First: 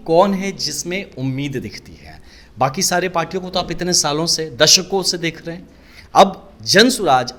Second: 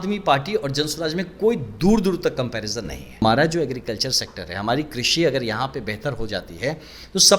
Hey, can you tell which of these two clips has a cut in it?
second; 1 cut; at 3.1 s

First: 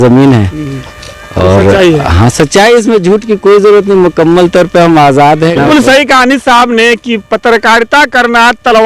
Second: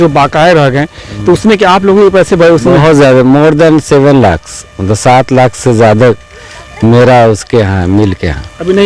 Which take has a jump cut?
first; 1 cut; at 5.6 s

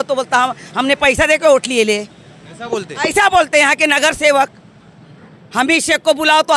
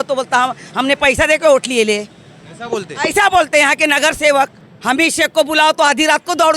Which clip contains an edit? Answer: second; 1 cut; at 4.7 s

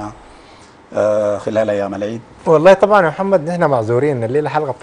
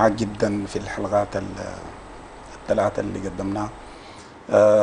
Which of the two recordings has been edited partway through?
first; 1 cut; at 2.3 s

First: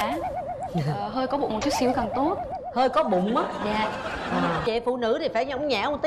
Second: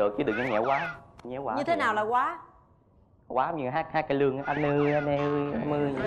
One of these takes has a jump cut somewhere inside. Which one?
first; 1 cut; at 4.6 s

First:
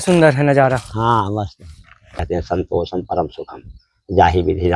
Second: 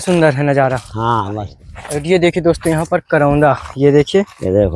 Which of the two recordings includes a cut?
first; 1 cut; at 1.9 s

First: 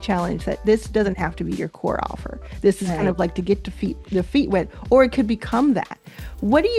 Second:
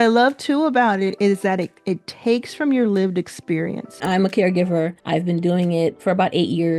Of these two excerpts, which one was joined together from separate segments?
second; 3 cuts; at 4.0 s, 5.0 s, 6.0 s

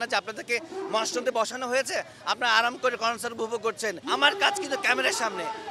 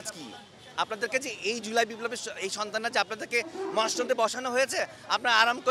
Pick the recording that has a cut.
first; 1 cut; at 3.9 s

